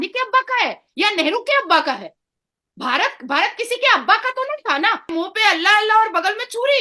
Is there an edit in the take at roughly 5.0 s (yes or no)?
yes